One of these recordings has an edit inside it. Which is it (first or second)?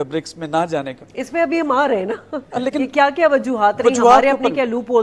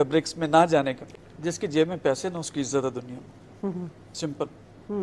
second